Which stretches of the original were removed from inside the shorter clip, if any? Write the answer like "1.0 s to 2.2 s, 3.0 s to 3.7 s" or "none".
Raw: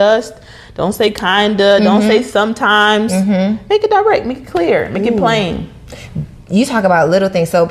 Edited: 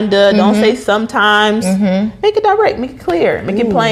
none